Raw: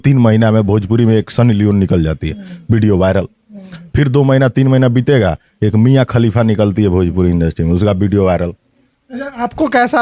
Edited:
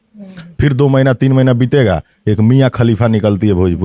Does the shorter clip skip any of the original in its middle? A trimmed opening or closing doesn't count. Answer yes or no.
no